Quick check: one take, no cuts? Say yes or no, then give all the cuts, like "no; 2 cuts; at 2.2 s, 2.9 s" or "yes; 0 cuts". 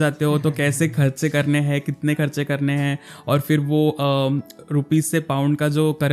yes; 0 cuts